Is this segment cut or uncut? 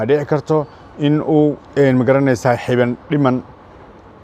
cut